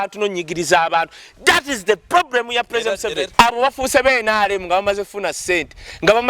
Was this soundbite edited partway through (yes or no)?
yes